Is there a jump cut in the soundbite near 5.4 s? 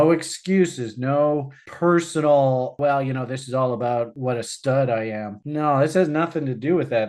no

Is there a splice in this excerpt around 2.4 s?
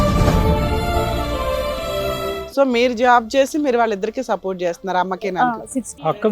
yes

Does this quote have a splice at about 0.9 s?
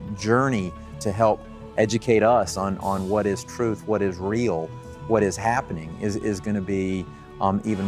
yes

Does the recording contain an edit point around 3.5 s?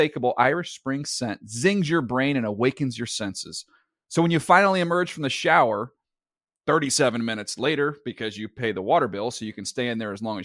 no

